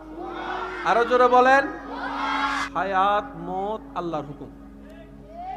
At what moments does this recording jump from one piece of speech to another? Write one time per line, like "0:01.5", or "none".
0:02.5